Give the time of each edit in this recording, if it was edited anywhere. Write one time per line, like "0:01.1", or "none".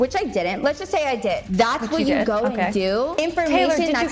0:01.4
0:03.2